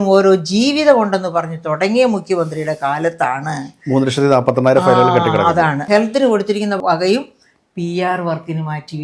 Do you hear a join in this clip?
yes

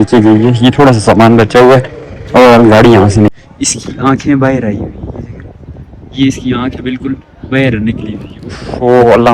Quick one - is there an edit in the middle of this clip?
yes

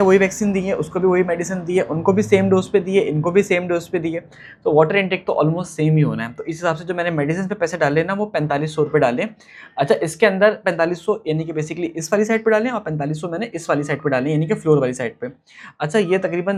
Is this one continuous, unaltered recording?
yes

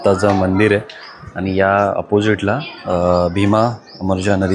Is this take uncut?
yes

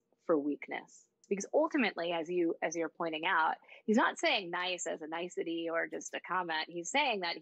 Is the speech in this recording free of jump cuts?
no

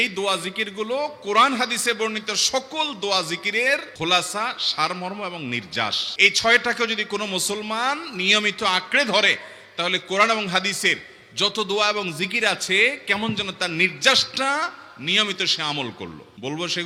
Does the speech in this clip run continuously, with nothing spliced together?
yes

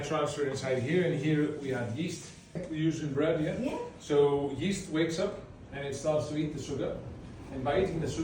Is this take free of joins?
no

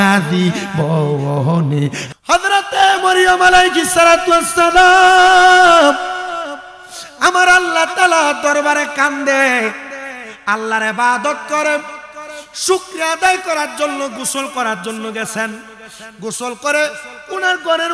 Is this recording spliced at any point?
yes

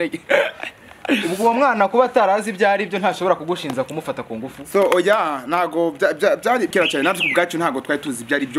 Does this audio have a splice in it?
no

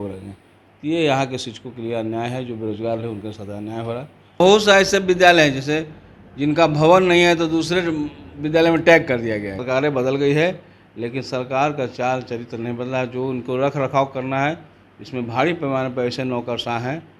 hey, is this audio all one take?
no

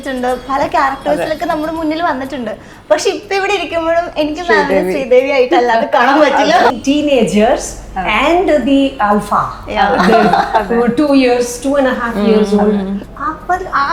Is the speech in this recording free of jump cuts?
no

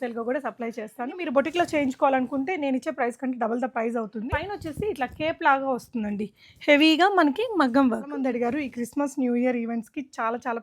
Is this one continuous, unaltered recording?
no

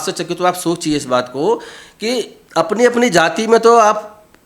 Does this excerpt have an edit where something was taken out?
yes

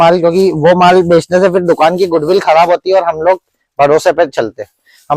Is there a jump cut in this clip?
no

